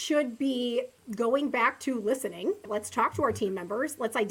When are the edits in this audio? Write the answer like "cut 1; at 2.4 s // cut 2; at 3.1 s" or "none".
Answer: cut 1; at 1.0 s // cut 2; at 2.6 s